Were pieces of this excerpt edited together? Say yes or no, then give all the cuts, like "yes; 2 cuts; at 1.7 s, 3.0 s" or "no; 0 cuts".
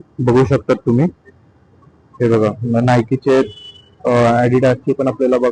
no; 0 cuts